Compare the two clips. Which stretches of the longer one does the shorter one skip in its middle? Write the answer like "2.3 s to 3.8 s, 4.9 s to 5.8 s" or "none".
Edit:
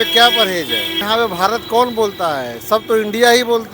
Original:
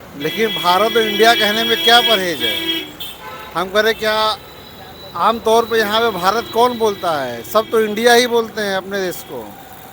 2.8 s to 5.9 s